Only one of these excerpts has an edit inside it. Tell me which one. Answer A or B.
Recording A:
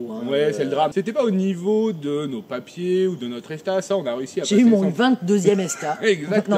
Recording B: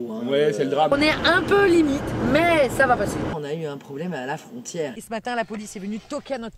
B